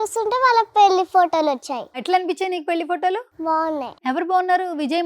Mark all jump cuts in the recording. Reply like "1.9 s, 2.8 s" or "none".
2.0 s, 3.6 s